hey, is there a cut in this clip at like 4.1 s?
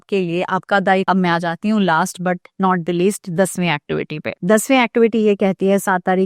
no; 1 cut; at 1.0 s

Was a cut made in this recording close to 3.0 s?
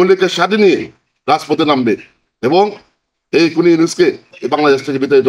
no; 0 cuts

